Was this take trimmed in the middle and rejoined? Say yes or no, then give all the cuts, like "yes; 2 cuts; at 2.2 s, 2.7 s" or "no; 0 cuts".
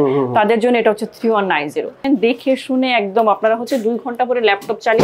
yes; 1 cut; at 2.0 s